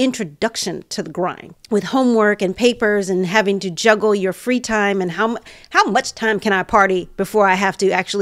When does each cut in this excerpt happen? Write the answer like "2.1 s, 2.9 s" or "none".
1.5 s